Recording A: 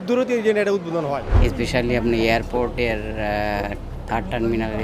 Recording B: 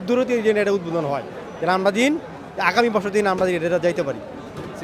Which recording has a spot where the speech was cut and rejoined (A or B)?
A